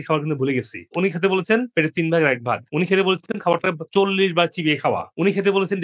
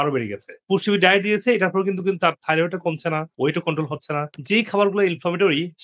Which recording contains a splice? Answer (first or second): second